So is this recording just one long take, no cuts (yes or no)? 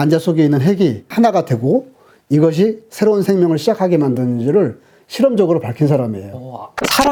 yes